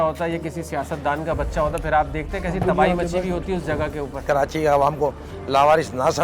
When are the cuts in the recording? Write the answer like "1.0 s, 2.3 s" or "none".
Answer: 4.2 s